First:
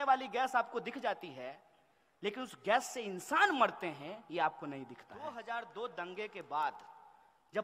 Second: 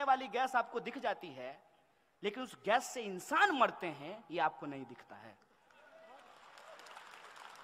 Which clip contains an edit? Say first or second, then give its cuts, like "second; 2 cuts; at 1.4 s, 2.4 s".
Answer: first; 1 cut; at 5.2 s